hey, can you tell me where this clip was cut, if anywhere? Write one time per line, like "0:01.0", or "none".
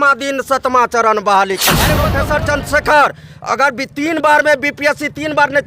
0:02.1